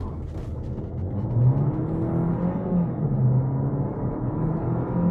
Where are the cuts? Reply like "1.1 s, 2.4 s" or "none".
none